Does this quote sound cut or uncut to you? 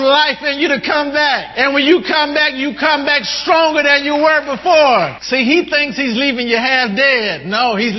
cut